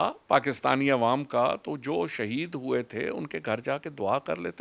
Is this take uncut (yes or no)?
yes